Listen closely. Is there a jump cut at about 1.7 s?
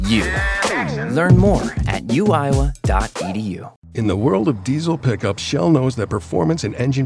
no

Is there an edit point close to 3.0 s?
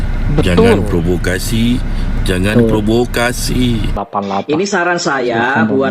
no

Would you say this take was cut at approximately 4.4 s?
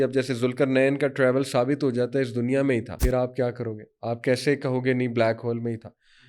no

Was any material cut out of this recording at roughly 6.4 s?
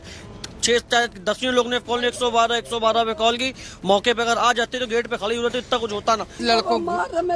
yes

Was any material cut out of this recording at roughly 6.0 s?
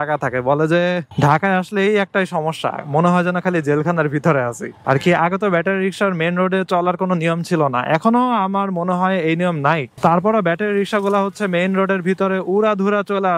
no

